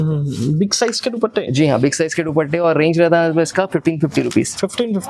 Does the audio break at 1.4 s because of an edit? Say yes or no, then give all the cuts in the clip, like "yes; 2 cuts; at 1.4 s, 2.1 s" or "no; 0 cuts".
no; 0 cuts